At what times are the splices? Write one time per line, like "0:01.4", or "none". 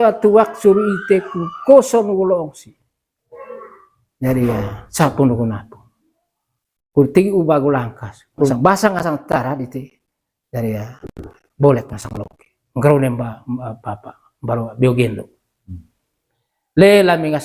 0:08.5